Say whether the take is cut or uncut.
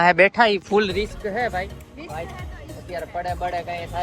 cut